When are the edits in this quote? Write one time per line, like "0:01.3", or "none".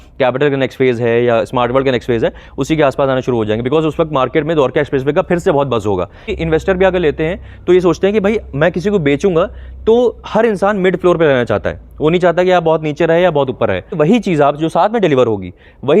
0:06.3
0:14.0